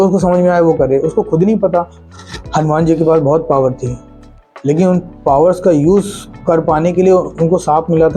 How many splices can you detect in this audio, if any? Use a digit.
2